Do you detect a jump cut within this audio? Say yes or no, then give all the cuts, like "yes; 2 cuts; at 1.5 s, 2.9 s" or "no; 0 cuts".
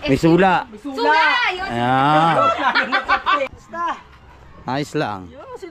yes; 1 cut; at 3.5 s